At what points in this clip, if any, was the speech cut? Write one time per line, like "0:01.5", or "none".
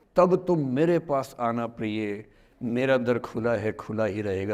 none